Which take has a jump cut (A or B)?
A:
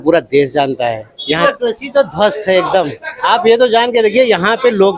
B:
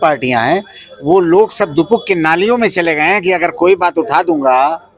A